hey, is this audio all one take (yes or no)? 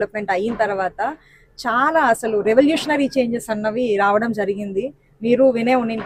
yes